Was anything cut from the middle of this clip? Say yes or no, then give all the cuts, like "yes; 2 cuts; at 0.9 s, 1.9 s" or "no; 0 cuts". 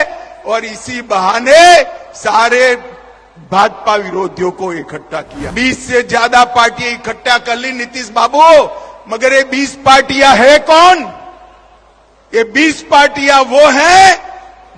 yes; 1 cut; at 5.4 s